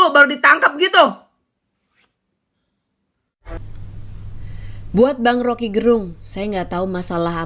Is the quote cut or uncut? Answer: cut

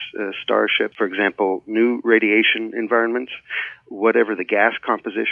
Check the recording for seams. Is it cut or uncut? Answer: cut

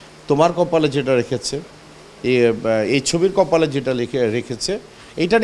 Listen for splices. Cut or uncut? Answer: uncut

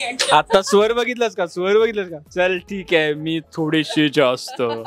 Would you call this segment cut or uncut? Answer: uncut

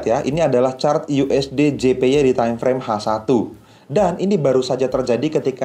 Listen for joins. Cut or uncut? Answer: uncut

